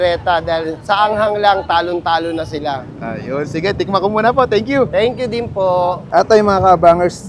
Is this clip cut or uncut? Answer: uncut